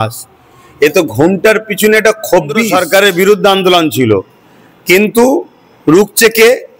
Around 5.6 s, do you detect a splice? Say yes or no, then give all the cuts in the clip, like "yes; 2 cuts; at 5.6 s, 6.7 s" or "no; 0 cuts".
no; 1 cut; at 2.7 s